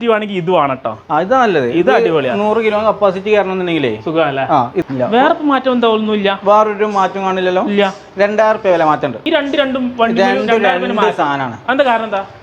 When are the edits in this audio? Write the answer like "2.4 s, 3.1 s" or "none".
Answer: 4.8 s